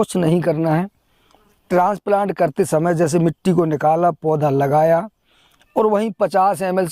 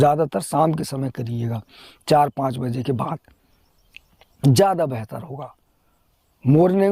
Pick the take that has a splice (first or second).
first